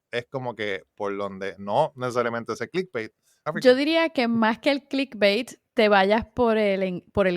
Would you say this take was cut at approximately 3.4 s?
yes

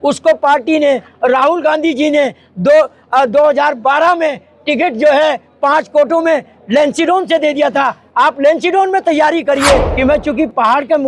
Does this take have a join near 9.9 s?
yes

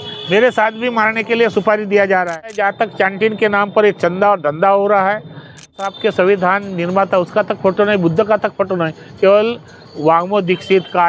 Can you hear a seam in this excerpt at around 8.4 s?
no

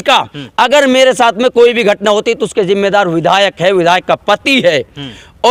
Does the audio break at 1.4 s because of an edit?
no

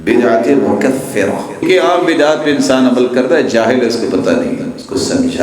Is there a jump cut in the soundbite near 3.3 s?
no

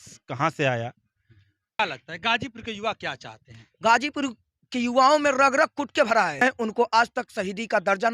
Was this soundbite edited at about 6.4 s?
yes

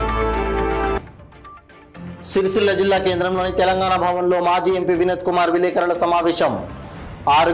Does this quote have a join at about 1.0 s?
yes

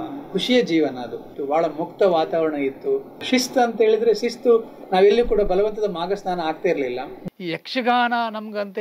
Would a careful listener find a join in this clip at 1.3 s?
yes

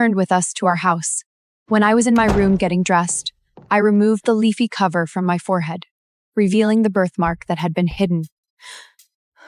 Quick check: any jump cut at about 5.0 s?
no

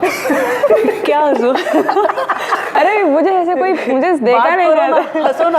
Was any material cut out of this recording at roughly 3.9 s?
no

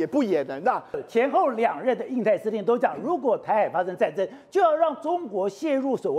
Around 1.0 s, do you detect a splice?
yes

